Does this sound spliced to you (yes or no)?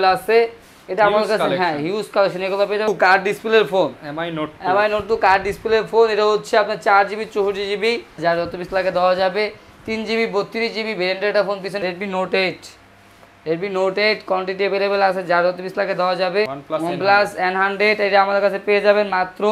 yes